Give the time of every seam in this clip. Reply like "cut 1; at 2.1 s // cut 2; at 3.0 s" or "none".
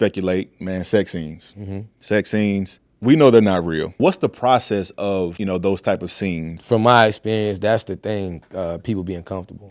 cut 1; at 4.0 s // cut 2; at 5.4 s // cut 3; at 6.5 s

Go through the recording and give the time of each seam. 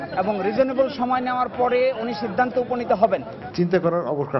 cut 1; at 3.4 s

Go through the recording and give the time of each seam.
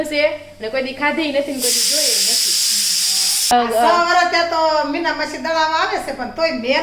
cut 1; at 3.5 s

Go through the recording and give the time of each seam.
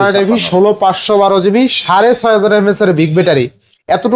none

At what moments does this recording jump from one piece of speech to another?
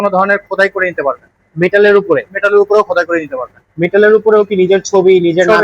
none

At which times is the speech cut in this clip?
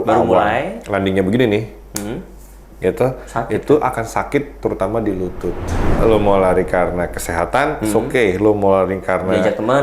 cut 1; at 6.0 s

